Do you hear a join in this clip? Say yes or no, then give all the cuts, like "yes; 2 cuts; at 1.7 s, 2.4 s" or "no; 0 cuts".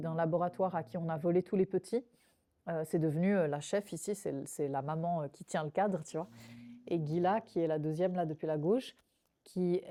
no; 0 cuts